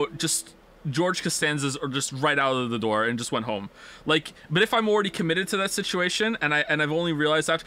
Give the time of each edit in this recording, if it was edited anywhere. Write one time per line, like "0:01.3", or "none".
0:01.4